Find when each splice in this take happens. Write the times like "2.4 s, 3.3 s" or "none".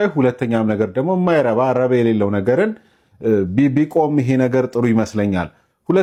none